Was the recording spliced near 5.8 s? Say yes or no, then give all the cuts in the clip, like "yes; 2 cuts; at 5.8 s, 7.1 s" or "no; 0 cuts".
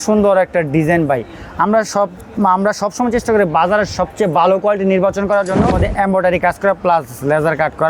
yes; 1 cut; at 5.8 s